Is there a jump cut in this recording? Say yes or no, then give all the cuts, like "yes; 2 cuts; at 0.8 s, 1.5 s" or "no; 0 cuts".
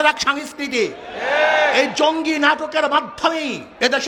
no; 0 cuts